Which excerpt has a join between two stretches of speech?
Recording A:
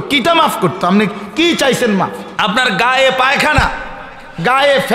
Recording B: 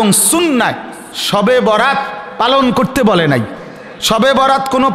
A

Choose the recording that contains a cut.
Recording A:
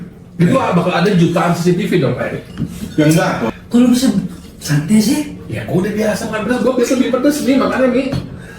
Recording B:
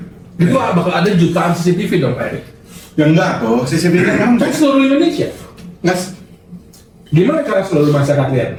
A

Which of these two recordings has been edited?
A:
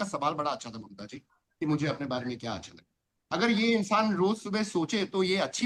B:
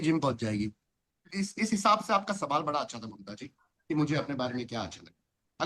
B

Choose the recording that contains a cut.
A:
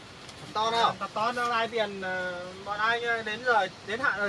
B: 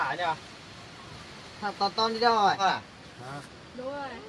B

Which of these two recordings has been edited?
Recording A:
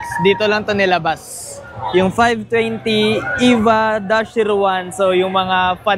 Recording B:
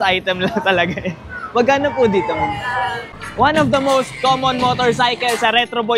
B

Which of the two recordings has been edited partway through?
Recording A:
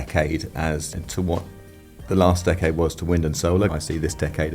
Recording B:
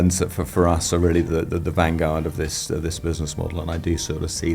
A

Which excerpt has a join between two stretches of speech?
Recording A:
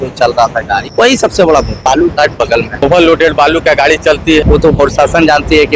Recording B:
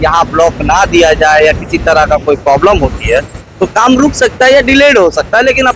A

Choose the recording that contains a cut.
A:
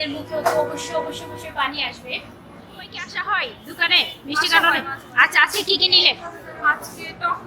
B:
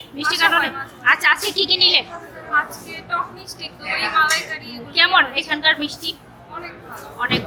A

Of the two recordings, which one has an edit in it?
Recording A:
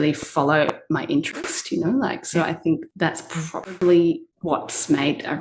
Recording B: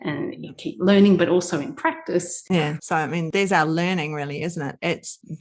B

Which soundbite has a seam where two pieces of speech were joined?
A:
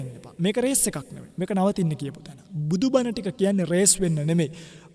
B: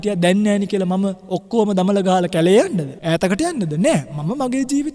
B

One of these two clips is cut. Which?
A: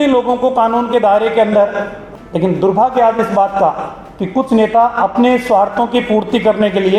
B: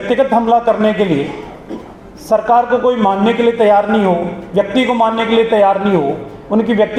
A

